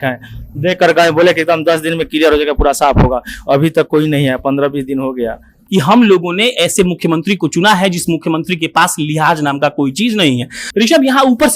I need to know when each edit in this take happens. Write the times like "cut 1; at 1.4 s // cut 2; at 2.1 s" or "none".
cut 1; at 5.6 s // cut 2; at 10.6 s